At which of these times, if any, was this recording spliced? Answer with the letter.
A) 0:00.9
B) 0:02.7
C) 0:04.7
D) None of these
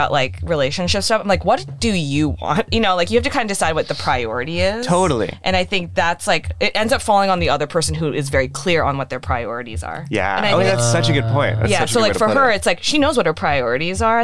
B